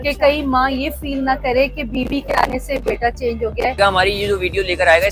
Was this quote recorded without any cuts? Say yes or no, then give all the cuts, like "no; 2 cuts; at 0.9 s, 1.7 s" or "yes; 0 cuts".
no; 1 cut; at 3.8 s